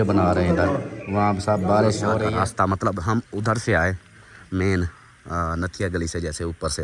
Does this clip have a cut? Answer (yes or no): yes